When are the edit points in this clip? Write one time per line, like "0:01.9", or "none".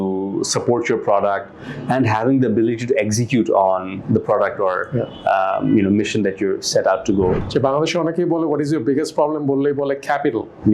0:07.4